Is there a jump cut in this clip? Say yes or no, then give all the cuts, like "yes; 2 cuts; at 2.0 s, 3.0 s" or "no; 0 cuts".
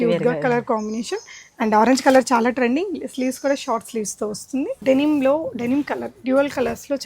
yes; 1 cut; at 4.8 s